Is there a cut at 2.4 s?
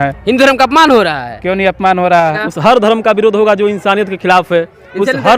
yes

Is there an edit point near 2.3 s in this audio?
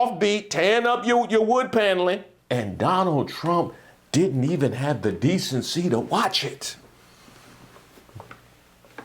yes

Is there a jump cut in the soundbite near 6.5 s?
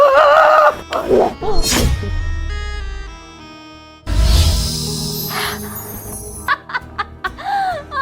yes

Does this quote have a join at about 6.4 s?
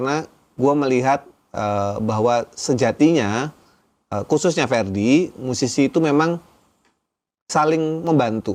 no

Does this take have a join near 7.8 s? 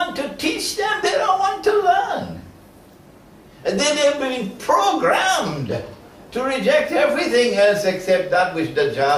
yes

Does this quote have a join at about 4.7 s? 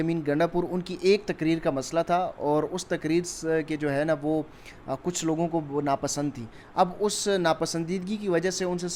no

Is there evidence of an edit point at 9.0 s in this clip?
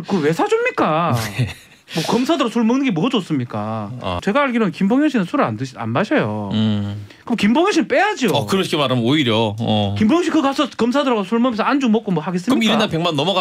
no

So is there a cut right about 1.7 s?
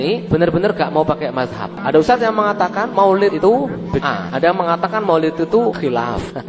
yes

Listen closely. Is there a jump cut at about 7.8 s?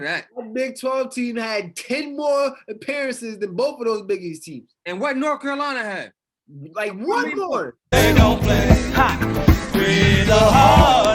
yes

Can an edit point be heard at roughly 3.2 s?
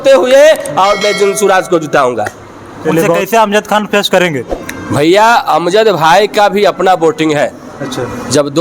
yes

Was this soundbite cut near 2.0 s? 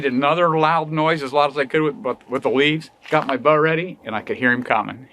no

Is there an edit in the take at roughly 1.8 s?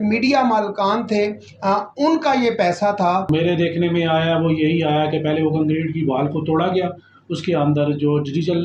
no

